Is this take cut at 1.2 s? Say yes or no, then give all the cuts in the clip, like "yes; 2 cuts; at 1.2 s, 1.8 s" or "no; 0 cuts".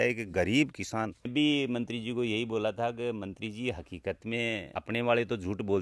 yes; 1 cut; at 1.2 s